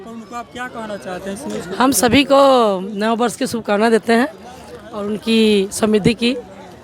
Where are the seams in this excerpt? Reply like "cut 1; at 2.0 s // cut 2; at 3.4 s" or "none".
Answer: none